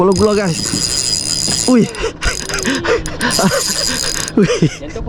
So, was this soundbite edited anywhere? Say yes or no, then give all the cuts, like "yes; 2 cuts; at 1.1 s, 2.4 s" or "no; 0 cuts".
no; 0 cuts